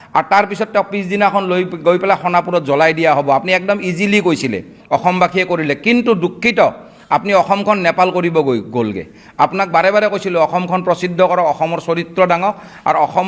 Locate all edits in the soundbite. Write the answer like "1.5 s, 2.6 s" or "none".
4.7 s